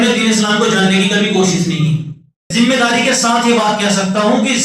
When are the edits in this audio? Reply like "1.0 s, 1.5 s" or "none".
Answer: 2.5 s